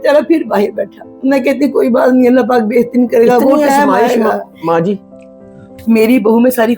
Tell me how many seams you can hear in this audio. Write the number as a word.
one